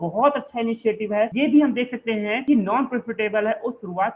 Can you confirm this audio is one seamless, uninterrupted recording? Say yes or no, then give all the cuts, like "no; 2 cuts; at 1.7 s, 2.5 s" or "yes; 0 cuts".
no; 2 cuts; at 1.3 s, 2.4 s